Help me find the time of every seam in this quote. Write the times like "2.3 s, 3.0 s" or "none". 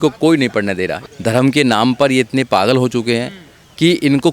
1.0 s